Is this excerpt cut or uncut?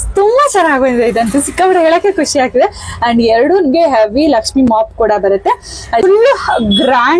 cut